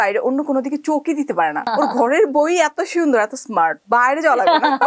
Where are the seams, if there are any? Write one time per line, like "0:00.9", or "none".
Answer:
0:01.7
0:03.8